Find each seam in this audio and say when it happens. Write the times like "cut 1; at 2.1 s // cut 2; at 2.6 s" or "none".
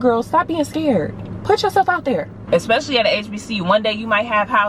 cut 1; at 2.4 s